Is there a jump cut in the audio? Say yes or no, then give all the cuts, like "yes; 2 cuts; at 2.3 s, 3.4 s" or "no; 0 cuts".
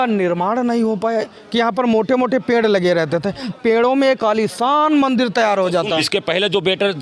yes; 3 cuts; at 1.4 s, 3.5 s, 6.0 s